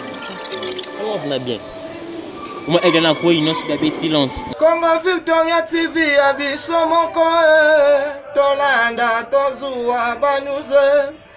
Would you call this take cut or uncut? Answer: cut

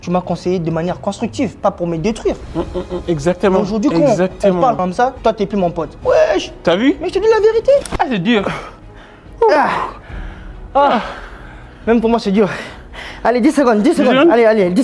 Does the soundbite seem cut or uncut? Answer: cut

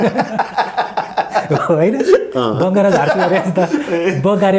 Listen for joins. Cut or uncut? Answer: uncut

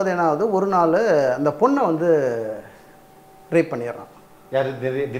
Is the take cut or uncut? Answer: uncut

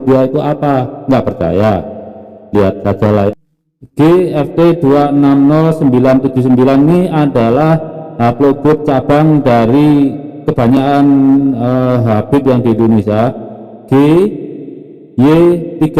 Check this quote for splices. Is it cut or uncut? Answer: cut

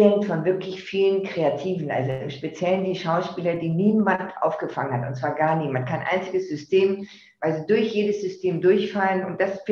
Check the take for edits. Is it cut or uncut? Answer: uncut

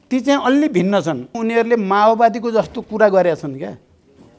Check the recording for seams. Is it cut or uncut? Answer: cut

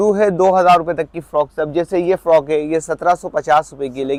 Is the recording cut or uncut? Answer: uncut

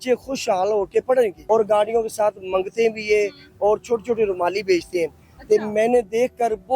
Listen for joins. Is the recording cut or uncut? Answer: cut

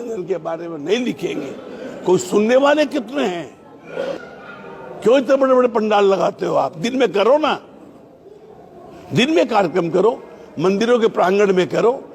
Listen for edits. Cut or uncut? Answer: cut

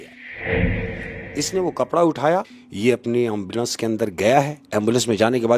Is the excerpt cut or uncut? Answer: cut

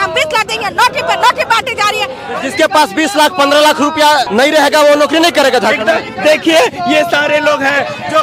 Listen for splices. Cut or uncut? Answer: cut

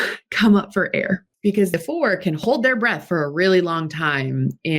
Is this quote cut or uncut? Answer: cut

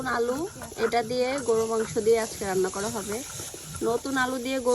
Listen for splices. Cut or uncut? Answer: cut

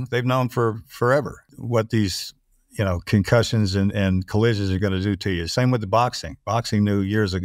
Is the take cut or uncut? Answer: cut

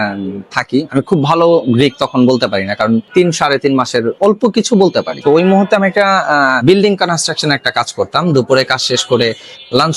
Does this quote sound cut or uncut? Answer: cut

